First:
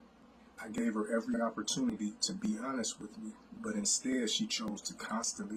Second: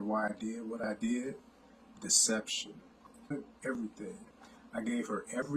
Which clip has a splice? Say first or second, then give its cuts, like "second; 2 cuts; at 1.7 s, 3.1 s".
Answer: second; 1 cut; at 3.3 s